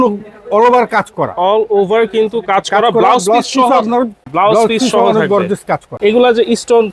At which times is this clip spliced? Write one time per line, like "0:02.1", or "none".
0:04.2
0:05.9

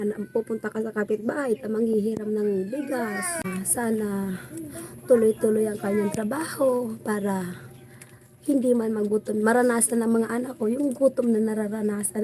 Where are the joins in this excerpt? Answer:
0:03.4

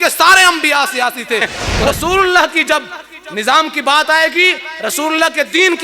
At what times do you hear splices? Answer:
0:01.6

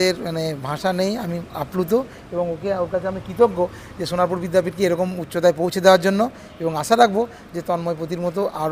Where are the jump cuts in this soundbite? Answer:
none

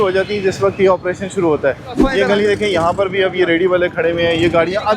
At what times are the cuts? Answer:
0:01.9

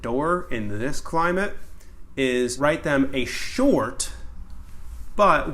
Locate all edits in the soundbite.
0:02.5

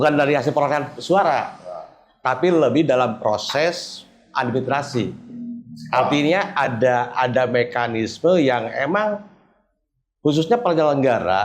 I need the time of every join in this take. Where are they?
none

